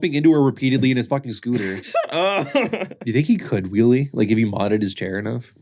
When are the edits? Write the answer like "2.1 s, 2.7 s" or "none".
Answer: 1.9 s, 2.9 s